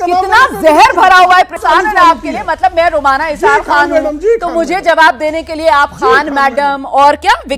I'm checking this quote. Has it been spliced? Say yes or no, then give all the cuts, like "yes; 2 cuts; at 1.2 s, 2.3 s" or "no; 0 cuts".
yes; 1 cut; at 1.6 s